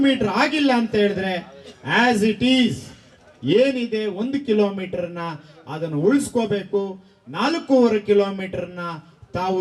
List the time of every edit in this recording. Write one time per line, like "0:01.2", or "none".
none